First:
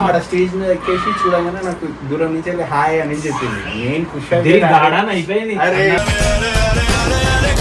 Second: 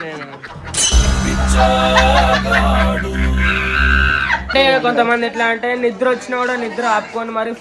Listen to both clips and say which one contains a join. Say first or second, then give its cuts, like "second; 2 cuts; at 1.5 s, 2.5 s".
second; 1 cut; at 4.5 s